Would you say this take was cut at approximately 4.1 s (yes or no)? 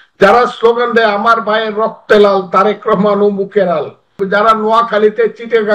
yes